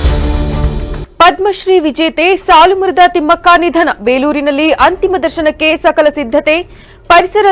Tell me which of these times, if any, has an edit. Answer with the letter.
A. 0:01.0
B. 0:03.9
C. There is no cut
A